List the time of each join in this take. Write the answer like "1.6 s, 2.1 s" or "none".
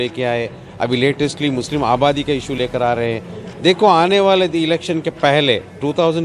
none